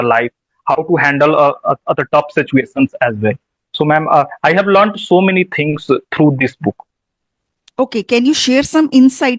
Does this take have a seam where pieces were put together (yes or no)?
no